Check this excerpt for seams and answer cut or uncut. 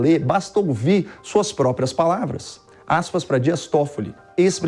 uncut